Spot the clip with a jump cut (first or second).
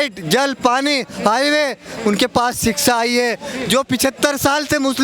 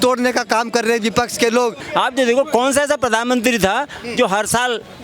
second